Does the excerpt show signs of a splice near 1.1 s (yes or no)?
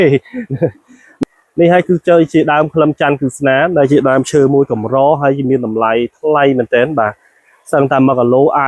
yes